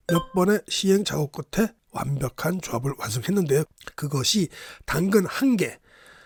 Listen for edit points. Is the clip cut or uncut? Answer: uncut